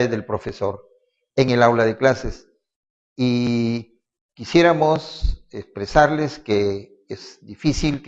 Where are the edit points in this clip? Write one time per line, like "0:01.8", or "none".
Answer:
0:05.5